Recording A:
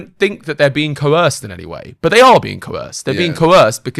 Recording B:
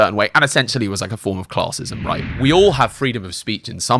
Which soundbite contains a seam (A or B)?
B